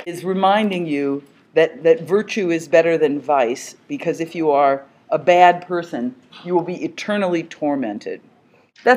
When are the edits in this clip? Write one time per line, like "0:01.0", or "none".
0:06.3